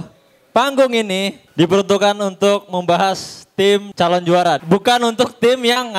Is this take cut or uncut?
cut